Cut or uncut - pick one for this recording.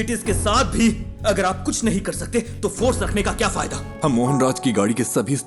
cut